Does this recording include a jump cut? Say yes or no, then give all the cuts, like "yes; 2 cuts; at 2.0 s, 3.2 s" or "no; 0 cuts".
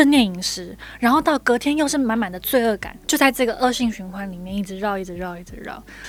no; 0 cuts